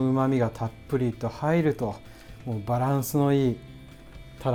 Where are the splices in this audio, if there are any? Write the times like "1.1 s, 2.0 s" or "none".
none